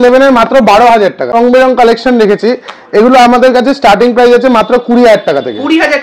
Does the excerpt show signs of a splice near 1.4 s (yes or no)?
yes